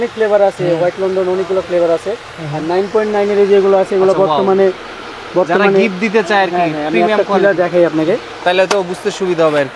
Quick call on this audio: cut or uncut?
uncut